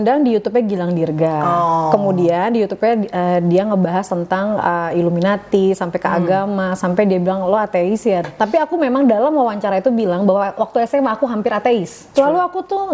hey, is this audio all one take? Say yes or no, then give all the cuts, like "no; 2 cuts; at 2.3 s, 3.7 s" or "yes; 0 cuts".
no; 2 cuts; at 8.3 s, 12.0 s